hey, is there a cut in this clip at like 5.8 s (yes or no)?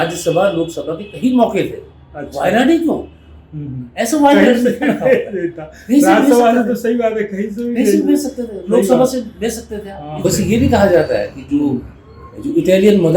no